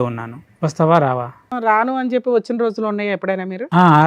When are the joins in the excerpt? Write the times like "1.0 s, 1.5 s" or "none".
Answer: 1.5 s